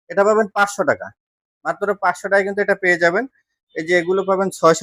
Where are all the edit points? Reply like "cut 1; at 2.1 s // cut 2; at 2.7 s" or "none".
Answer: none